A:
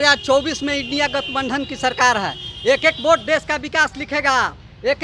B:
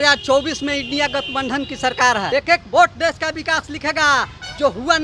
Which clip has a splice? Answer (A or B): B